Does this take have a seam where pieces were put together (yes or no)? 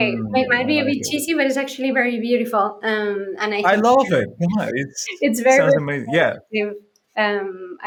no